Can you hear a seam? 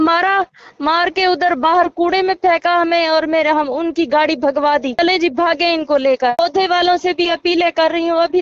yes; 2 cuts; at 5.0 s, 6.4 s

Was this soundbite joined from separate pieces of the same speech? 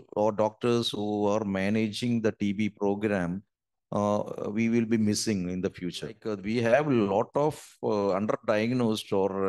yes; 1 cut; at 6.3 s

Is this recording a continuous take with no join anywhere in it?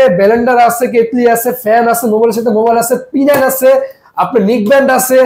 yes; 0 cuts

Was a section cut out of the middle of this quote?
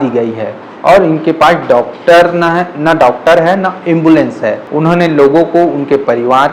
yes; 1 cut; at 4.6 s

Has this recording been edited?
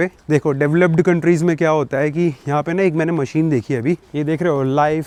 no; 0 cuts

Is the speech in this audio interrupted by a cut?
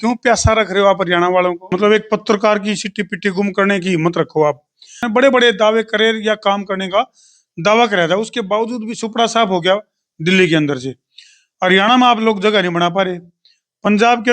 yes; 2 cuts; at 1.7 s, 5.0 s

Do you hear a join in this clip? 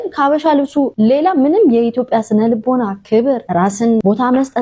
yes; 2 cuts; at 0.9 s, 3.7 s

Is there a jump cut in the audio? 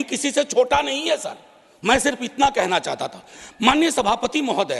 no; 0 cuts

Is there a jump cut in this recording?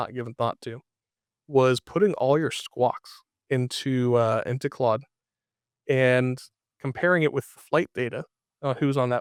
no; 0 cuts

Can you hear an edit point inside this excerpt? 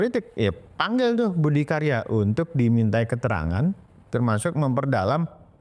no; 0 cuts

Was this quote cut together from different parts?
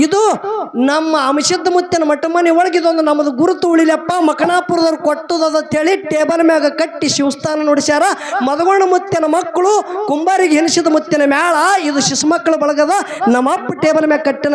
no; 0 cuts

